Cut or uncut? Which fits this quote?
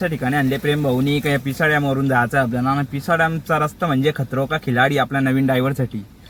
uncut